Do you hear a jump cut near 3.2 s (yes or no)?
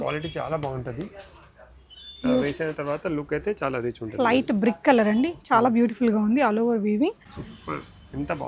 no